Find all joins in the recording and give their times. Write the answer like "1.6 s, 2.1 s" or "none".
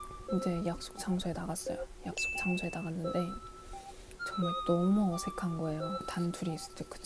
6.1 s